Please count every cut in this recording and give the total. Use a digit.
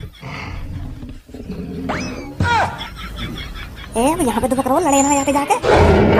0